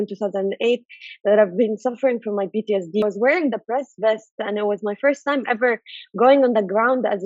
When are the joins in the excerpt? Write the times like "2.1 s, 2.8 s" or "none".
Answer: 3.0 s